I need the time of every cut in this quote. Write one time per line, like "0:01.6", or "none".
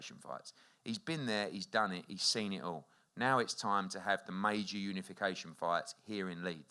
none